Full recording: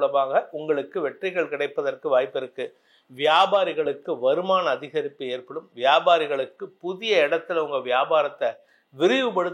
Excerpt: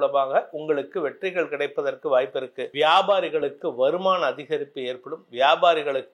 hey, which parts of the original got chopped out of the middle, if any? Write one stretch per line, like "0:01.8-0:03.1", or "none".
0:02.6-0:03.0